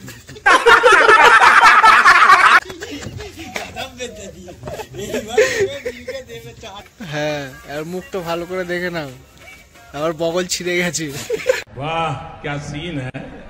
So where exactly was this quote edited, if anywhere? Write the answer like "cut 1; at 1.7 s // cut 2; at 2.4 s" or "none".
cut 1; at 6.7 s